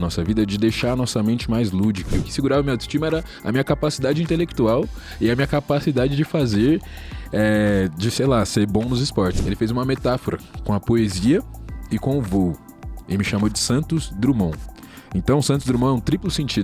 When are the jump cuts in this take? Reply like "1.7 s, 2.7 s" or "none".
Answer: 2.2 s, 9.4 s